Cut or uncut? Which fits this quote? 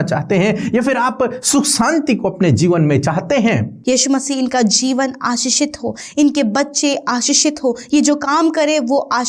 cut